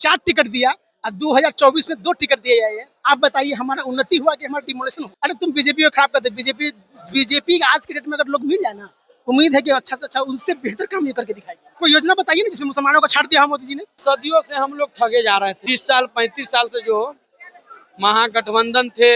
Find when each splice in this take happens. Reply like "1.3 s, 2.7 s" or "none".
5.0 s, 11.6 s, 13.9 s, 15.7 s